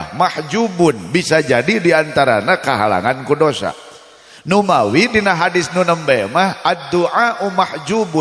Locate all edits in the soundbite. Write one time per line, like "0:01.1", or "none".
none